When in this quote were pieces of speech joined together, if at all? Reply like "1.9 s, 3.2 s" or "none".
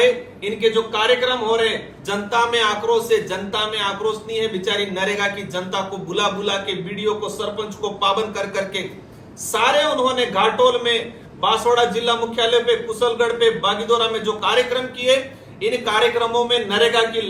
none